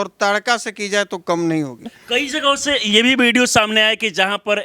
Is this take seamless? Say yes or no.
no